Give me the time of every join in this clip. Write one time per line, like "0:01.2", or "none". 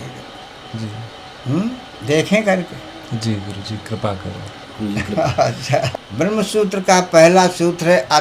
0:06.0